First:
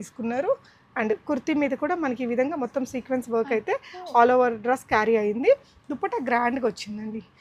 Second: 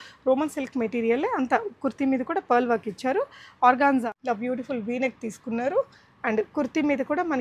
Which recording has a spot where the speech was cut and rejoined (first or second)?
second